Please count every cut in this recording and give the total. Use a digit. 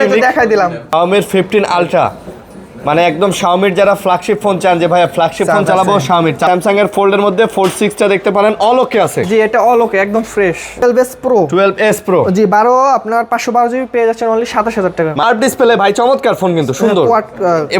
4